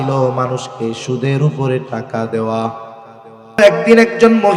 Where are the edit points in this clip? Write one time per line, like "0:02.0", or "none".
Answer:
0:03.6

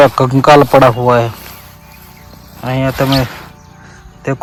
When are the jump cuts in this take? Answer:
none

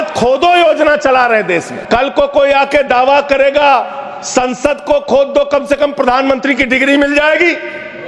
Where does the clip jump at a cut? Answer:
0:01.7

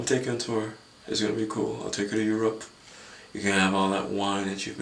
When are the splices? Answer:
none

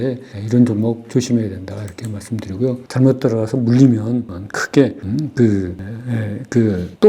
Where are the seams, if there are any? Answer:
0:02.8

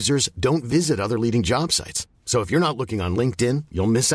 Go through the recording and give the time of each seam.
none

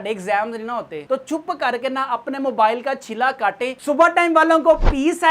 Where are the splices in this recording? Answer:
0:03.7

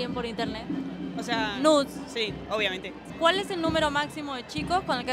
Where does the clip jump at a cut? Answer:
0:03.0

